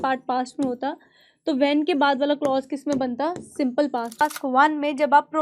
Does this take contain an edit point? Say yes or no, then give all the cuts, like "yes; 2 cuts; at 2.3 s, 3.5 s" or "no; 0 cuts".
yes; 1 cut; at 4.2 s